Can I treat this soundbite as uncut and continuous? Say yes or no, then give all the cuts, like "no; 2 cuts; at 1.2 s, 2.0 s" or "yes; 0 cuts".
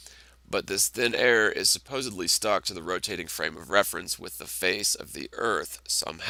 yes; 0 cuts